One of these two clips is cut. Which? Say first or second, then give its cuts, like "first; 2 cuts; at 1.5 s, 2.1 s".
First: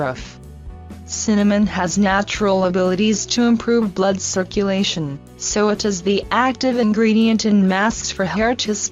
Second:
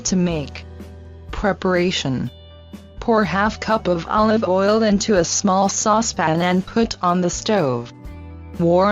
first; 1 cut; at 1.7 s